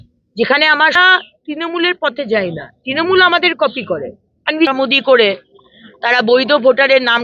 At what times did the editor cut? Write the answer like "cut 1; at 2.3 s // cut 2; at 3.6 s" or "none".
cut 1; at 1.0 s // cut 2; at 4.7 s